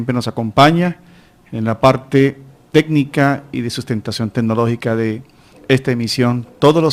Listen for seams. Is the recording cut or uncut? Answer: uncut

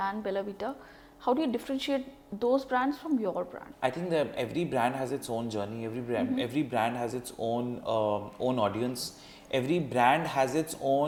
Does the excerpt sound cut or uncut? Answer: uncut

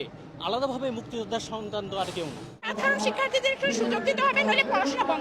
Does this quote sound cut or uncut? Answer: cut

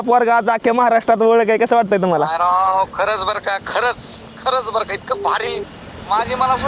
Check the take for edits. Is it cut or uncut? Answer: uncut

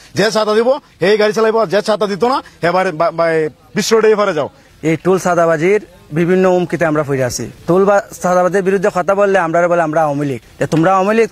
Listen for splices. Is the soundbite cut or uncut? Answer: cut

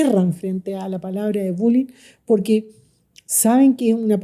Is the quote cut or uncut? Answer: uncut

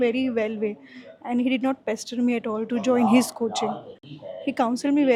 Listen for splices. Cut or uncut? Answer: uncut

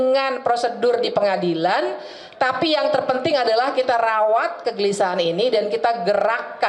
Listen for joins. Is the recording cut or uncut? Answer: uncut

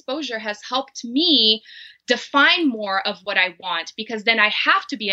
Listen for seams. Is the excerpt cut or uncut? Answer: uncut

